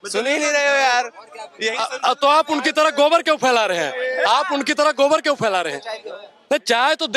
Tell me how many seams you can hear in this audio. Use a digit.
0